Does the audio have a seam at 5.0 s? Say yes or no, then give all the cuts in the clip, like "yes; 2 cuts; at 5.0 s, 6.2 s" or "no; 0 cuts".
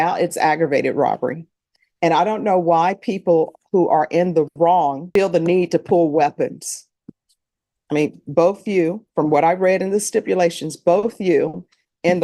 yes; 1 cut; at 5.0 s